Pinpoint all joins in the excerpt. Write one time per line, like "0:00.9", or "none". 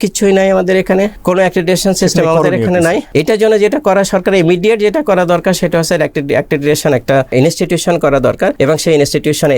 0:01.2
0:03.1
0:07.3
0:08.5